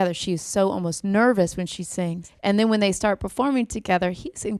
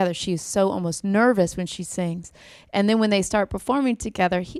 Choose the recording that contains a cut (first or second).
first